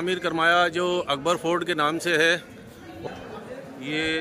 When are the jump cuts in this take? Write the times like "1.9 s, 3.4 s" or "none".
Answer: 2.9 s

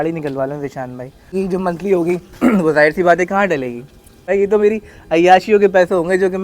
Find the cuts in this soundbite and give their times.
1.3 s, 4.3 s

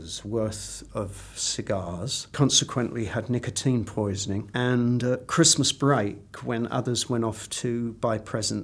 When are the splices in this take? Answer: 2.2 s, 4.5 s

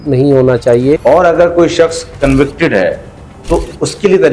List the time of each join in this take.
1.0 s

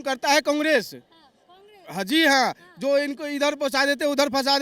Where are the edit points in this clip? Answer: none

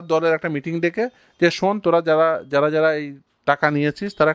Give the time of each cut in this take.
none

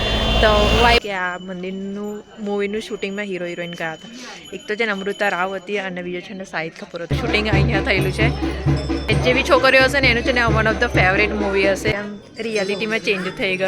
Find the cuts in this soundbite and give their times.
1.0 s, 7.1 s, 9.1 s, 11.9 s

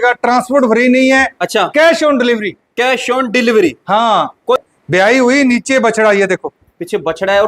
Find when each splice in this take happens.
4.6 s

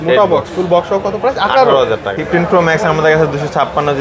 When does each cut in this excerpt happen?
2.1 s

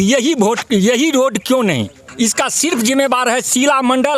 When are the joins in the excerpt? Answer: 2.0 s

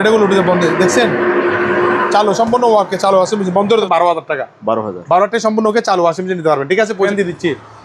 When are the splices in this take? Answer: 3.8 s, 7.1 s

